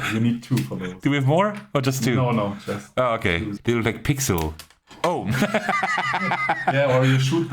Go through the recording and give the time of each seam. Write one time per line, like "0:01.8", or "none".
0:03.6